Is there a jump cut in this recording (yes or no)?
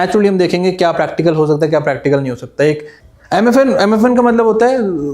yes